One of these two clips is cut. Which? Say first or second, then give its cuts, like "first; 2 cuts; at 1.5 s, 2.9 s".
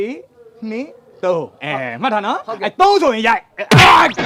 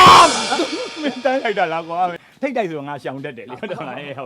second; 1 cut; at 2.3 s